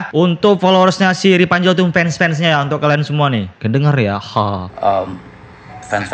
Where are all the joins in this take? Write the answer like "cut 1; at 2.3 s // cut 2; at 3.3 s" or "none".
none